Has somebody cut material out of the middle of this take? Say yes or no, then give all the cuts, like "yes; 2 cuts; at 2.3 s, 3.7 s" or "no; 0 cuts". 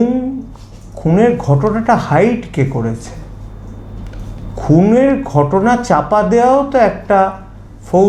no; 0 cuts